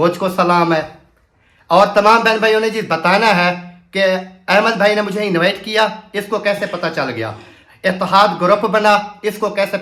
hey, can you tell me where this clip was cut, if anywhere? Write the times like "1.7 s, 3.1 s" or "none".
none